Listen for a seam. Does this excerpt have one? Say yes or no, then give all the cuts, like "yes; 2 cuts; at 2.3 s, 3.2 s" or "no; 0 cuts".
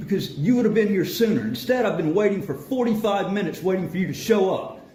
no; 0 cuts